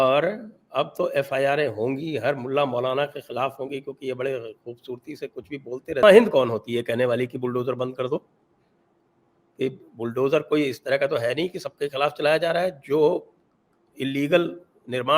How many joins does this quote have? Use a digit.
1